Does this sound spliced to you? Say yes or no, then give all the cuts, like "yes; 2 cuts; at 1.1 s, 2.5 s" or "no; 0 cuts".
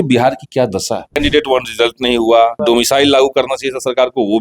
yes; 2 cuts; at 1.2 s, 2.6 s